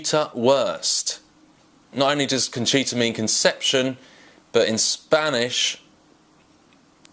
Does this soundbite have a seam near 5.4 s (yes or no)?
no